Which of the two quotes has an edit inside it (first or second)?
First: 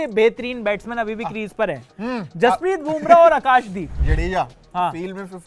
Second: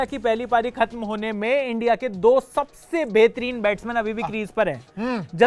first